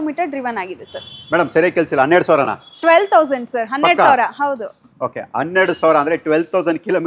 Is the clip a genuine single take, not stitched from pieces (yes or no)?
yes